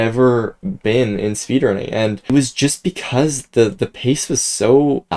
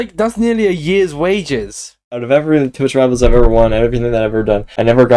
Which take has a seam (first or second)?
second